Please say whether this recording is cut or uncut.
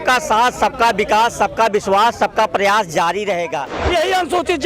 cut